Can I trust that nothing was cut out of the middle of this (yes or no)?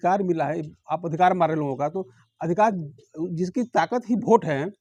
yes